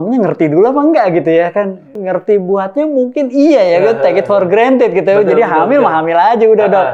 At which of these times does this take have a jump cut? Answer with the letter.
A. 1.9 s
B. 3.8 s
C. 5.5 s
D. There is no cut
A